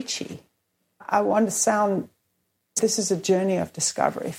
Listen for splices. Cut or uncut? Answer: cut